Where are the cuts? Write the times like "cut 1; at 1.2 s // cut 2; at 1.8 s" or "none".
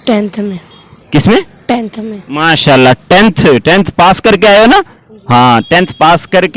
none